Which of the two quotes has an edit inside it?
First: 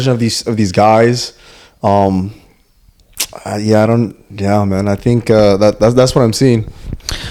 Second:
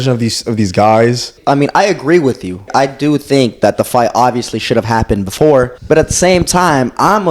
second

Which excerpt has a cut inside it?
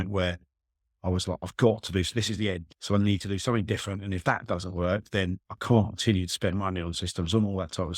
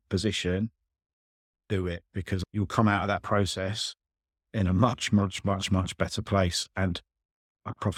first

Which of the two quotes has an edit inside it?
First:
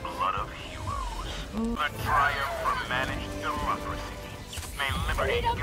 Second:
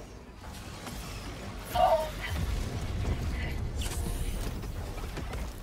first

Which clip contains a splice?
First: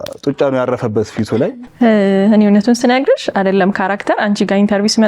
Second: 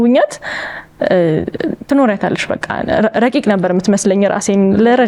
first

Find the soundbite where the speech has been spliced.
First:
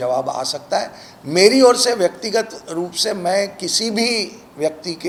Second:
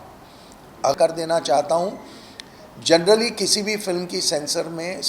second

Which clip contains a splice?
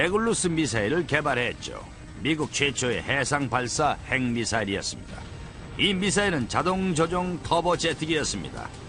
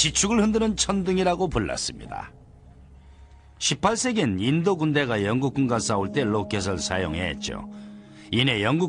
second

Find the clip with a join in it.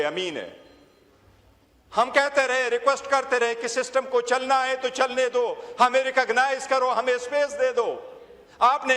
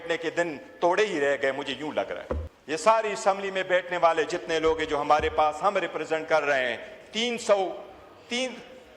second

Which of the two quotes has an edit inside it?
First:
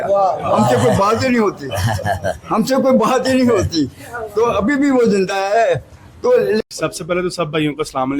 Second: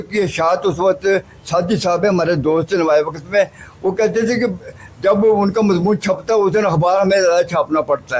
first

